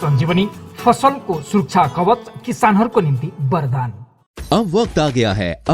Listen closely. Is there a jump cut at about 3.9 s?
no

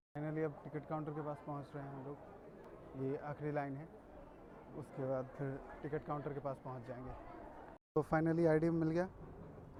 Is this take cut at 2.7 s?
no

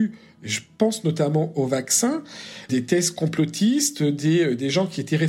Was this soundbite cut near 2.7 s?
yes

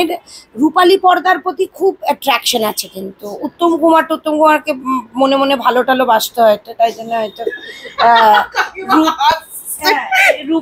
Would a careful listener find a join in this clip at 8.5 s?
no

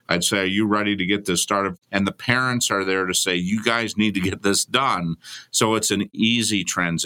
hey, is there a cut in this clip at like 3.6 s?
no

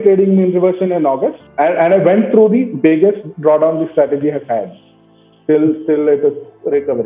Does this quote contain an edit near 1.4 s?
no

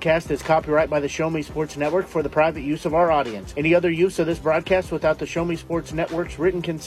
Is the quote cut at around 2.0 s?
no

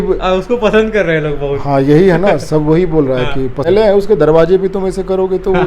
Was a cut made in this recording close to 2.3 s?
no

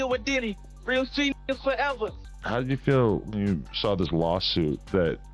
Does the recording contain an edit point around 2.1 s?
yes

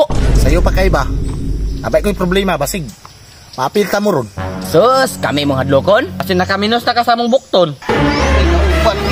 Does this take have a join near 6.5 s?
no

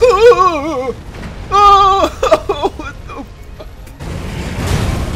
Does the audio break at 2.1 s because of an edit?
no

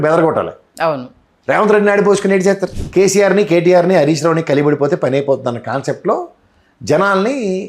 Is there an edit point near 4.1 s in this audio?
no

